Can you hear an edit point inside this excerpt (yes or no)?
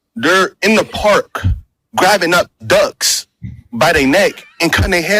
no